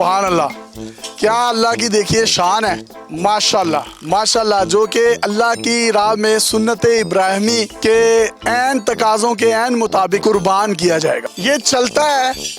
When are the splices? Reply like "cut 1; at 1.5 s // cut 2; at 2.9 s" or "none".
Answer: cut 1; at 11.3 s